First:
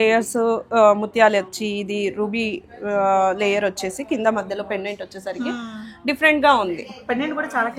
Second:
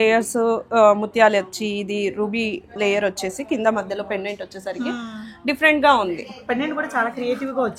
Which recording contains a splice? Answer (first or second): second